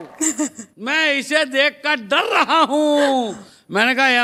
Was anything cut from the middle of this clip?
no; 0 cuts

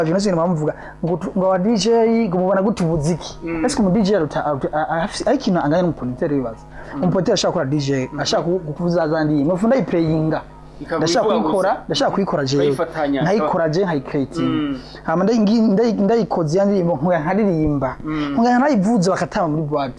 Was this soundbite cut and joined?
no; 0 cuts

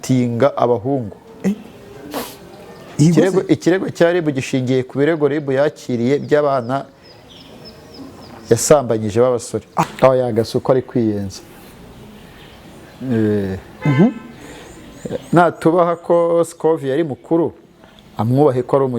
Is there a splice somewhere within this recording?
yes; 1 cut; at 9.9 s

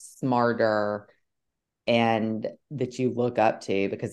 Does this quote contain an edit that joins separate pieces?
no; 0 cuts

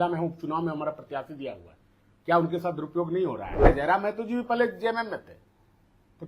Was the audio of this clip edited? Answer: yes; 1 cut; at 3.7 s

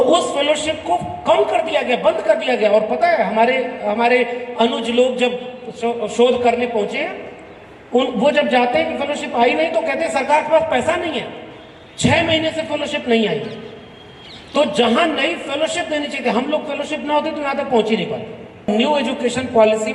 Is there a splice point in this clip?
yes; 1 cut; at 18.7 s

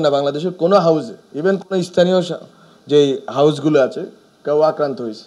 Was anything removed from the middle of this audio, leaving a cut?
no; 0 cuts

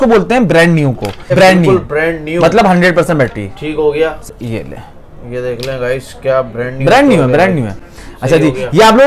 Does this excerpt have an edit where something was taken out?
yes; 2 cuts; at 1.3 s, 4.3 s

